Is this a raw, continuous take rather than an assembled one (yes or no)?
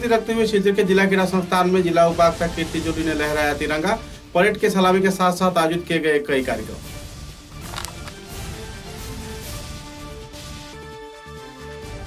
yes